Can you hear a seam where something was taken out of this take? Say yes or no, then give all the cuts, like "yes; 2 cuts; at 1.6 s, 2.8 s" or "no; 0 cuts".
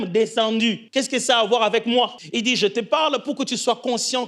yes; 2 cuts; at 0.8 s, 2.2 s